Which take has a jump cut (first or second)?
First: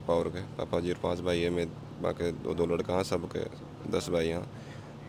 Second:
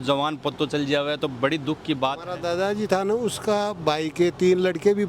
second